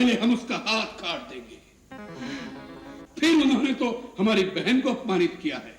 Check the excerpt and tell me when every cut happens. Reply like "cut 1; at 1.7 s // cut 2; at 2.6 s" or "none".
cut 1; at 3.0 s